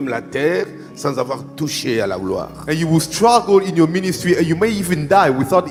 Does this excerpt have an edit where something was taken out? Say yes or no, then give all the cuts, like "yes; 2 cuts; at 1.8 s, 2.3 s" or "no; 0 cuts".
no; 0 cuts